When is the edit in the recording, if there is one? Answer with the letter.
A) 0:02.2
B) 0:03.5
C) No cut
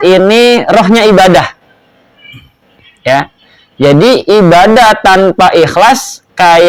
C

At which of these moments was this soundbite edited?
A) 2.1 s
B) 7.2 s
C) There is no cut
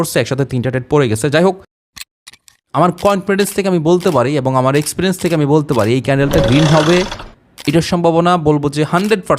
A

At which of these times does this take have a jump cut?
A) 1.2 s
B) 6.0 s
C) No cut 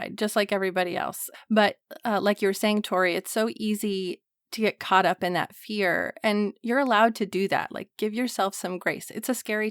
A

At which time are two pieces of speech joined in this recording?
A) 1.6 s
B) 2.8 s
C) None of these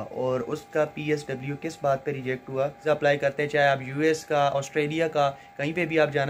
B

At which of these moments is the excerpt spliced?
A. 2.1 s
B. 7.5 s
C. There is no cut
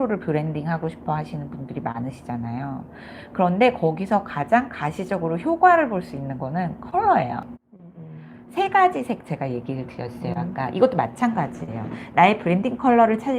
B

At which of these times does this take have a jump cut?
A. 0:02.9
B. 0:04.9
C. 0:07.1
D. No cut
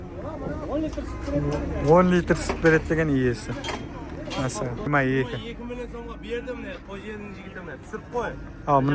B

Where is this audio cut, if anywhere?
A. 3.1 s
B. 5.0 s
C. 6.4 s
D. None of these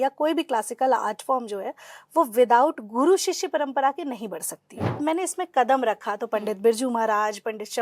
B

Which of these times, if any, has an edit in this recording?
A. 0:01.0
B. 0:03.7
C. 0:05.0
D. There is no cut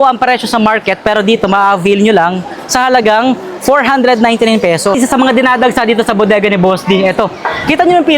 C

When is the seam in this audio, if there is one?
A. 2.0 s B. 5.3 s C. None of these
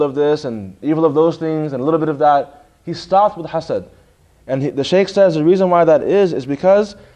A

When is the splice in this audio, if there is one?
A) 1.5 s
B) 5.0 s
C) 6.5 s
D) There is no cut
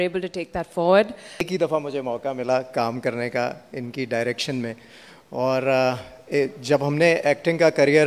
A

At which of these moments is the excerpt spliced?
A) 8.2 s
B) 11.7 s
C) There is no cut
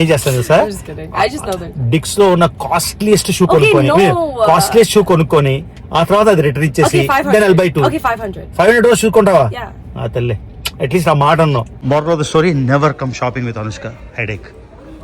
B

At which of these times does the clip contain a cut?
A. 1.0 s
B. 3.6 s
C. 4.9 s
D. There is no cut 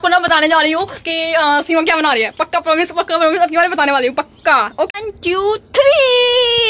C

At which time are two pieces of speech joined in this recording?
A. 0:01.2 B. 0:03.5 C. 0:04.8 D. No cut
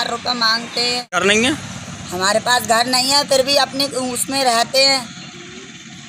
A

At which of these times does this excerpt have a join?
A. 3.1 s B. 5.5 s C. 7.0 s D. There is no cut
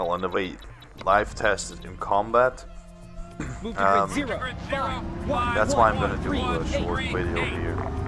B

